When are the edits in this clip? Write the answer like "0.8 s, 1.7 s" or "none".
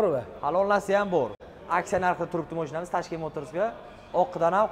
1.4 s